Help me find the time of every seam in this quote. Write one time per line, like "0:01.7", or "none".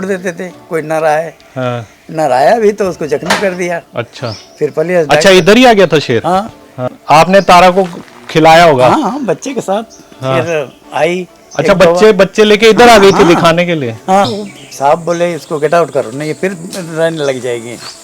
0:03.9
0:06.9
0:14.4